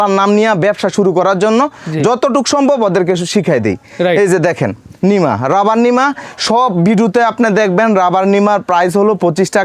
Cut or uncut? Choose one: uncut